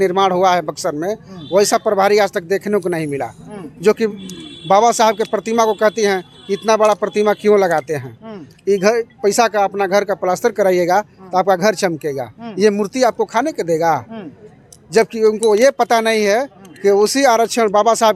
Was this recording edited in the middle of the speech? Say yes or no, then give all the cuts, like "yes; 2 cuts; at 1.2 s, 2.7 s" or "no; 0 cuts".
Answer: no; 0 cuts